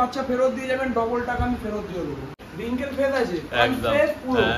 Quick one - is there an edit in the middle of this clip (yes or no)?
yes